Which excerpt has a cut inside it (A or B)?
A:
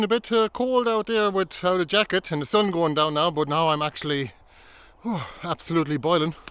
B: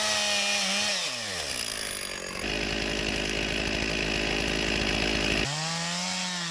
B